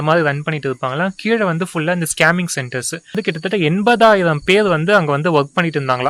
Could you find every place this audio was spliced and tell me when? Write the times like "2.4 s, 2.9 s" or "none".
3.1 s